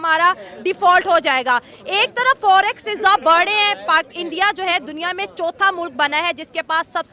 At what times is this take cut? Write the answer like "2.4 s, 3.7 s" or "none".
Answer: none